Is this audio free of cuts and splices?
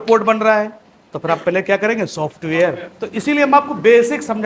no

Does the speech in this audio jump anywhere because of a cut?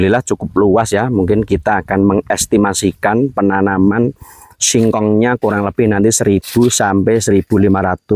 no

